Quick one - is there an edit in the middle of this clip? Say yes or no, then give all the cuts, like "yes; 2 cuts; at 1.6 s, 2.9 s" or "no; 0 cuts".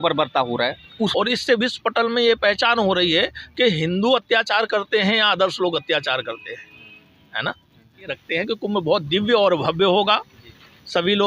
yes; 2 cuts; at 1.1 s, 8.2 s